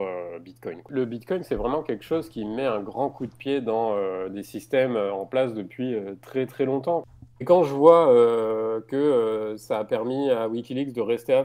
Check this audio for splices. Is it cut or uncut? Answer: cut